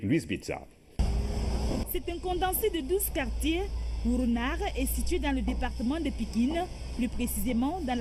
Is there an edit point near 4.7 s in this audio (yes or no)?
yes